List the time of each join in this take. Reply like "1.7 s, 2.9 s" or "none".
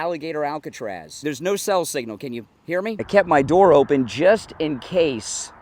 1.2 s, 3.0 s